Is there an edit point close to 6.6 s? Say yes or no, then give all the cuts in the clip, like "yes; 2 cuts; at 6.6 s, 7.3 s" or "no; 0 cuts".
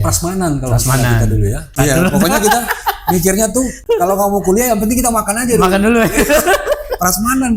no; 2 cuts; at 1.7 s, 3.8 s